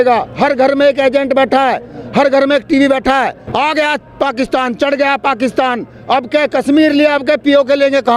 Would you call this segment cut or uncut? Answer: cut